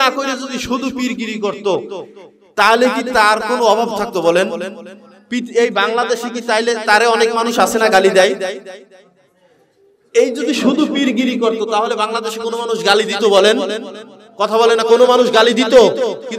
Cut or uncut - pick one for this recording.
uncut